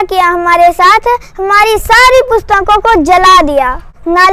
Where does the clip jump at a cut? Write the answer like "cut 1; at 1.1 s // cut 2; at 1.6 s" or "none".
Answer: none